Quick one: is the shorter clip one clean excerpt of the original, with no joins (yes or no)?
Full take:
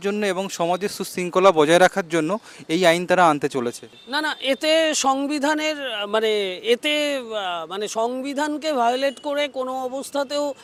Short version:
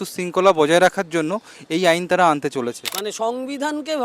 no